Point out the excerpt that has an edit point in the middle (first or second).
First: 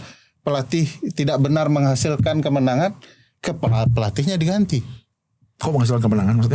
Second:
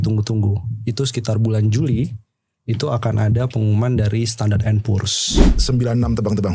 second